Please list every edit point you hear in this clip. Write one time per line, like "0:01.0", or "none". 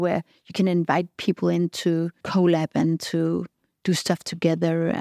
0:02.2